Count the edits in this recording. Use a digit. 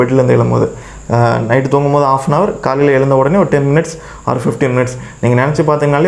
0